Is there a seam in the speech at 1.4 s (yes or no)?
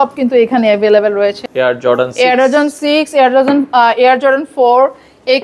yes